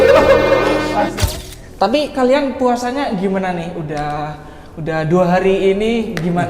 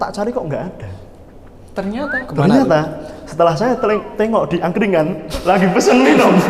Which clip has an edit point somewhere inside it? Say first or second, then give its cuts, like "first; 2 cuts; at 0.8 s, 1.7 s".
first; 1 cut; at 1.1 s